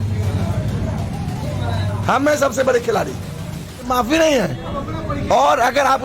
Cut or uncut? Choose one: cut